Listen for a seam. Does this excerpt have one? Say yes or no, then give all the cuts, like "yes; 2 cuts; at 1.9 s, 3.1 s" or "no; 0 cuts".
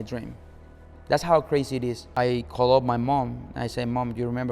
yes; 1 cut; at 2.1 s